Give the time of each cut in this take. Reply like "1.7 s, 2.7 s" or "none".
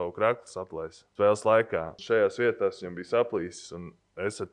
1.0 s, 1.9 s